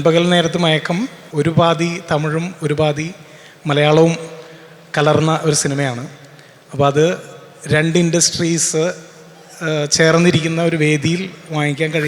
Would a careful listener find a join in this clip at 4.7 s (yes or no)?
no